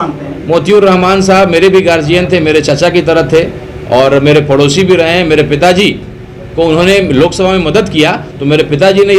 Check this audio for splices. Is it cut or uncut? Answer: uncut